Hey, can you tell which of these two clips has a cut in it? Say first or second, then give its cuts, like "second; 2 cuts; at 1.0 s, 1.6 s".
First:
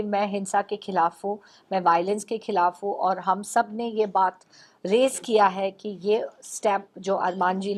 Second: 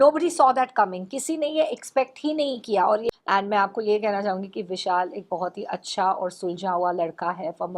second; 1 cut; at 3.0 s